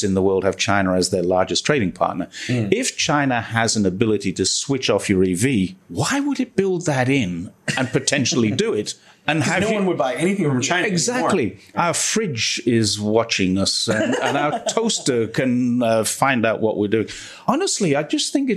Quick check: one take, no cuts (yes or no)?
yes